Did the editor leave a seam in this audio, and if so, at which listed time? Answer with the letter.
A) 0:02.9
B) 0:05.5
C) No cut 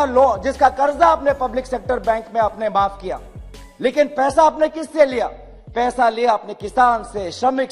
C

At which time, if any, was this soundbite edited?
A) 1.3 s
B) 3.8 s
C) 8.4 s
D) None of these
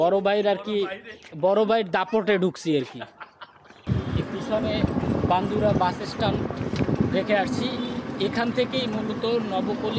B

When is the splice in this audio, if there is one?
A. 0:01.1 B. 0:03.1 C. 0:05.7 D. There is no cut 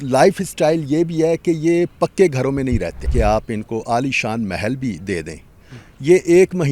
B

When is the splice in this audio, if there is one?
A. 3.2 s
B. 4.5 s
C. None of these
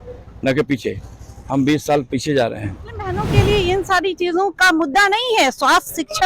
A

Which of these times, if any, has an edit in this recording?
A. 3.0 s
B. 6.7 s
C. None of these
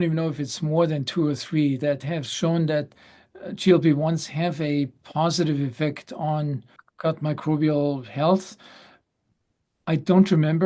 B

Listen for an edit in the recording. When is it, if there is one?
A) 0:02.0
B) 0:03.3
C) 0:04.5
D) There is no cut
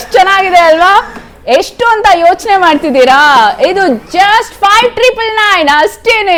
D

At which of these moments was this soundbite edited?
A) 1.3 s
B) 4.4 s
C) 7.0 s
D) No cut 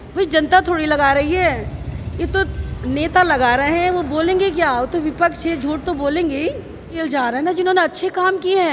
C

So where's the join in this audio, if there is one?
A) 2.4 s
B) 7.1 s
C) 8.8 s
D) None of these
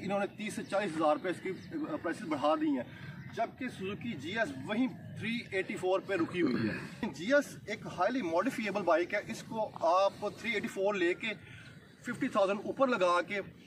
B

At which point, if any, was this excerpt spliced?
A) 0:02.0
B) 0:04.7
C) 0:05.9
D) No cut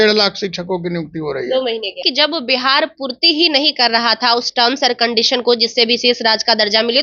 A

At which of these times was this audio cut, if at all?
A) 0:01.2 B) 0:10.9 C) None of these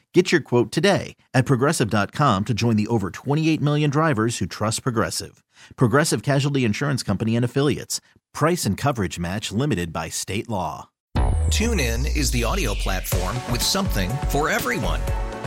B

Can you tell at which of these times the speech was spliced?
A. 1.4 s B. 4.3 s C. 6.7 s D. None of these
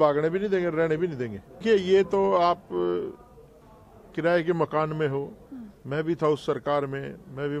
D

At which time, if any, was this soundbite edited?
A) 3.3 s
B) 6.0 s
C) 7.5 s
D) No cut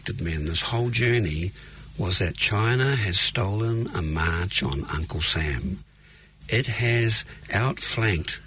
C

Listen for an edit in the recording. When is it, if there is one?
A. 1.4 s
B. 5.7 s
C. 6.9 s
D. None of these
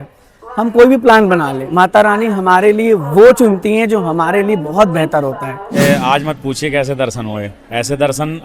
B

